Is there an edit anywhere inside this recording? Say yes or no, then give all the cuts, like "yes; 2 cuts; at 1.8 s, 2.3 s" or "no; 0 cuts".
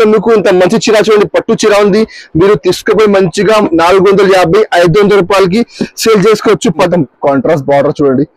yes; 1 cut; at 6.9 s